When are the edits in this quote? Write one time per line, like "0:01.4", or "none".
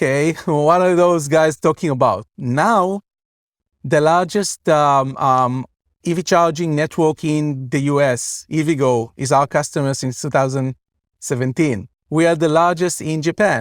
0:11.9